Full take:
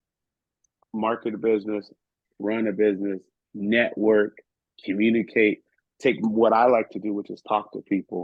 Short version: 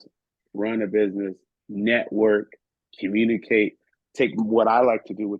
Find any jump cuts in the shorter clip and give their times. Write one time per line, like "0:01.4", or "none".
none